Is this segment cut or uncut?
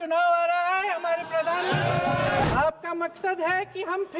cut